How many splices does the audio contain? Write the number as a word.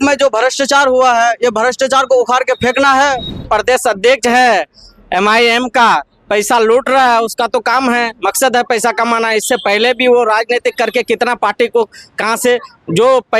one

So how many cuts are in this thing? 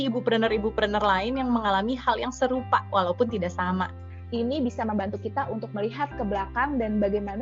one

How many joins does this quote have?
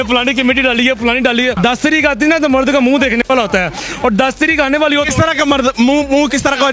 one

